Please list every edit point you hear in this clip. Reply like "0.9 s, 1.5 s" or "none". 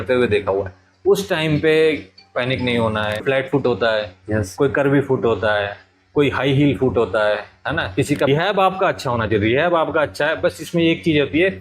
3.2 s, 8.3 s